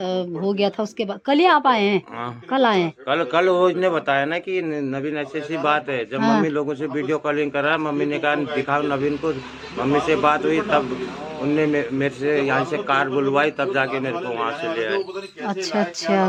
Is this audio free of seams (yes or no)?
yes